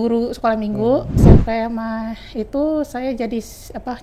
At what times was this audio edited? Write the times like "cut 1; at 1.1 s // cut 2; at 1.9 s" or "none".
cut 1; at 1.1 s